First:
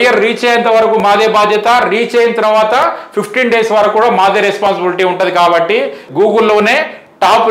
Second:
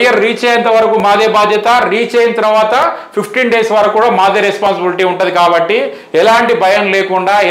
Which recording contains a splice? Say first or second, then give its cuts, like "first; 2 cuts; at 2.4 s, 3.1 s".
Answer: first; 1 cut; at 6.0 s